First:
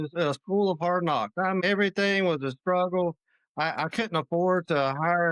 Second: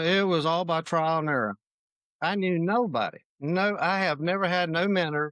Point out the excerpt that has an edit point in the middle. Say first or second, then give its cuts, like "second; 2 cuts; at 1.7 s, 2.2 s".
first; 1 cut; at 1.6 s